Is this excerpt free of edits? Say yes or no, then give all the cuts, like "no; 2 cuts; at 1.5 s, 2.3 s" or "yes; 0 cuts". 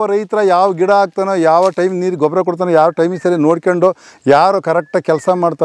yes; 0 cuts